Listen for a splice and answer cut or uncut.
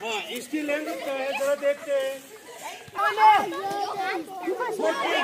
cut